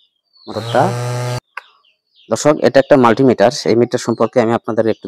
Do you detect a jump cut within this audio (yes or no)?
yes